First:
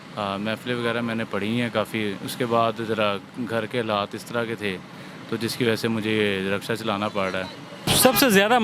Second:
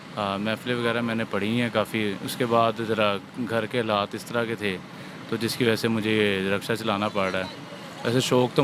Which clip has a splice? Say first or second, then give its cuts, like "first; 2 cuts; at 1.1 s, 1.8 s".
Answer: first; 1 cut; at 7.7 s